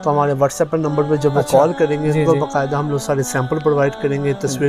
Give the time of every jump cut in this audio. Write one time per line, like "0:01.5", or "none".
none